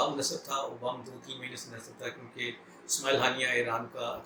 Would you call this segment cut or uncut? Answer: uncut